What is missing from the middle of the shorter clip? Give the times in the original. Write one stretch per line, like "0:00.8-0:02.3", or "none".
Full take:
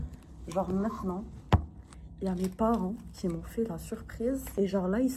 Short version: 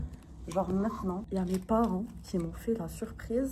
0:01.2-0:02.1